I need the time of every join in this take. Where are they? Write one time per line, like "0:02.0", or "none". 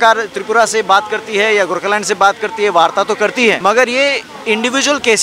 0:03.6